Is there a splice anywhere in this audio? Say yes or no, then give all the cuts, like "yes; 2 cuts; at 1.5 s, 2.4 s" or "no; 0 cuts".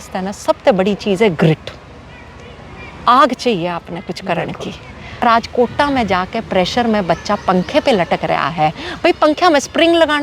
yes; 1 cut; at 5.2 s